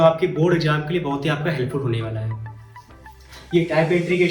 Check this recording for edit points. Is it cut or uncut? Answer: uncut